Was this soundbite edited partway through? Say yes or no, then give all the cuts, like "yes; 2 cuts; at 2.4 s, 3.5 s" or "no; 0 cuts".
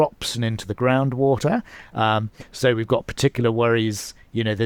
no; 0 cuts